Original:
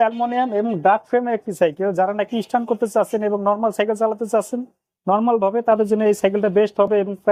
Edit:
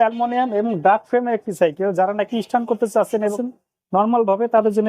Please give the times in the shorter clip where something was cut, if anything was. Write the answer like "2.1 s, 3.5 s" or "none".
3.4 s